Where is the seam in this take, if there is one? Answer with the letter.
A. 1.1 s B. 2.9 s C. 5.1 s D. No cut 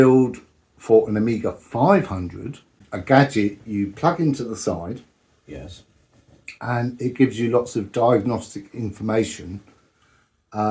B